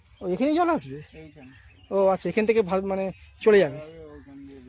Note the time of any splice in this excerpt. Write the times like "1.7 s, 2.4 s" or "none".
none